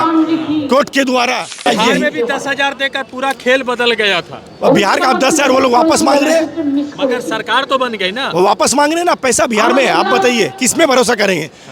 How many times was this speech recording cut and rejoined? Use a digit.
1